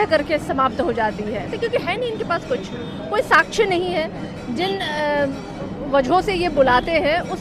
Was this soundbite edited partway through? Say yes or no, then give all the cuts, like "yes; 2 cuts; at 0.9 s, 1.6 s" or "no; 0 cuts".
yes; 1 cut; at 1.5 s